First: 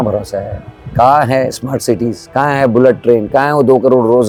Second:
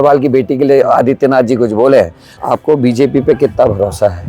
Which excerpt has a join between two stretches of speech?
second; 1 cut; at 2.3 s

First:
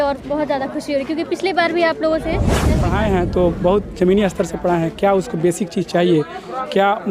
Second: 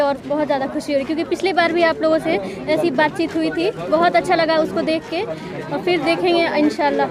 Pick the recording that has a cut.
first; 1 cut; at 2.7 s

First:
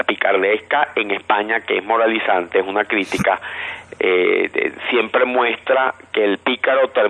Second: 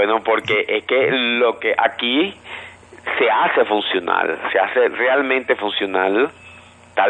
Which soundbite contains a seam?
first; 1 cut; at 4.7 s

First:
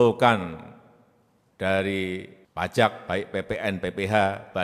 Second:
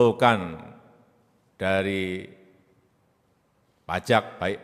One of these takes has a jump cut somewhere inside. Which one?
first; 1 cut; at 2.4 s

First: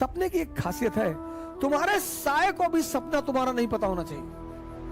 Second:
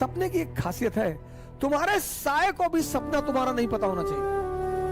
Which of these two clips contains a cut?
second; 1 cut; at 4.0 s

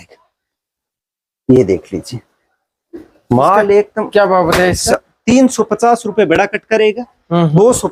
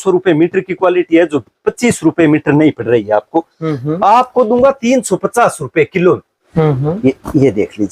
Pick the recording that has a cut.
second; 1 cut; at 6.4 s

